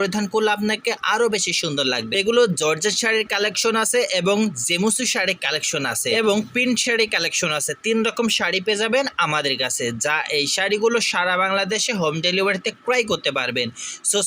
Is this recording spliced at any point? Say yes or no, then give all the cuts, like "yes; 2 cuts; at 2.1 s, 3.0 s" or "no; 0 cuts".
yes; 2 cuts; at 2.1 s, 6.1 s